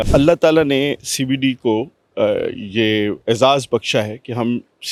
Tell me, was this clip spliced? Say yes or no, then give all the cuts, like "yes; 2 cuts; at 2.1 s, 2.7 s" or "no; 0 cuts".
no; 0 cuts